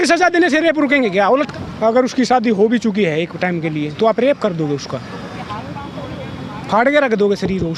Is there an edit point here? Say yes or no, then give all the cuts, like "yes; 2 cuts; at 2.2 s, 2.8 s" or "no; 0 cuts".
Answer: yes; 1 cut; at 1.5 s